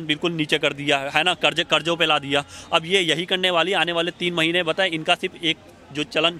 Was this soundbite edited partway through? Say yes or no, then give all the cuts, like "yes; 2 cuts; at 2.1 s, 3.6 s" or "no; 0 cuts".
no; 0 cuts